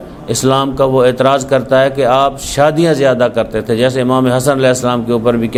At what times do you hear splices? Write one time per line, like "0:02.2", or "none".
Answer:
none